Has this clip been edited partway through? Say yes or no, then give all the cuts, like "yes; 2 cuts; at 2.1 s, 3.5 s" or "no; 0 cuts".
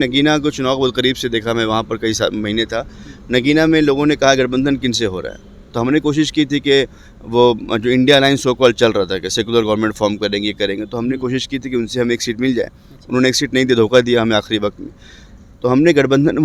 no; 0 cuts